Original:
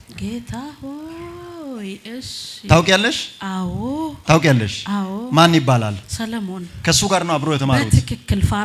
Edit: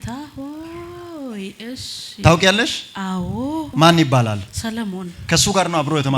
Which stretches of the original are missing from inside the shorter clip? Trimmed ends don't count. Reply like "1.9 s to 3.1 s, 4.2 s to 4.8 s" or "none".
4.1 s to 5.2 s